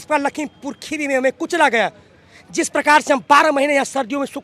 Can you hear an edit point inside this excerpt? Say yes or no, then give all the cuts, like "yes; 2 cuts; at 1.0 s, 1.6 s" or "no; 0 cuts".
no; 0 cuts